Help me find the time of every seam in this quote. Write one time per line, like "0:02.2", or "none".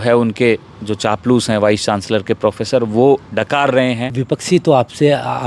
0:04.1